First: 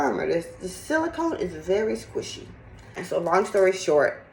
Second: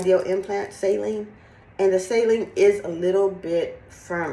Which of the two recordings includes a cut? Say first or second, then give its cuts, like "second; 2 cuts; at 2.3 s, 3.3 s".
first; 1 cut; at 3.0 s